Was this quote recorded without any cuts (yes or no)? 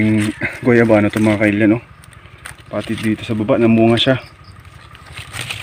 yes